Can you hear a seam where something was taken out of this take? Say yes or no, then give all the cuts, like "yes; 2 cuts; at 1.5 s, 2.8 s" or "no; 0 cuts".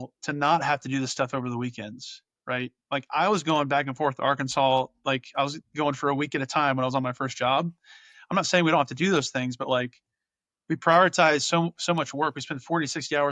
no; 0 cuts